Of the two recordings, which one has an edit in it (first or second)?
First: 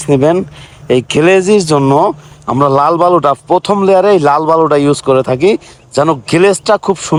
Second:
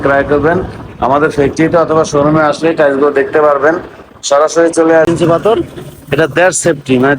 second